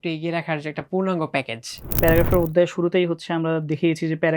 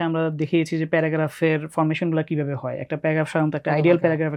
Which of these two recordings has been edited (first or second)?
first